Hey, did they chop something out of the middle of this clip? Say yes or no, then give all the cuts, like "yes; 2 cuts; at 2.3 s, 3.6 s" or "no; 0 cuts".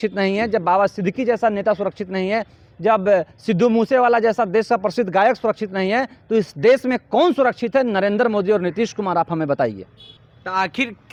no; 0 cuts